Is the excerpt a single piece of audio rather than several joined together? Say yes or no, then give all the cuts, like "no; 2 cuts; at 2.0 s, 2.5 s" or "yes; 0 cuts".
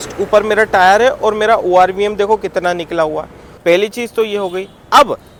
yes; 0 cuts